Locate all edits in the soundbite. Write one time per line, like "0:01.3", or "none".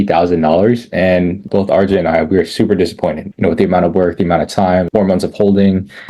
0:01.4
0:04.9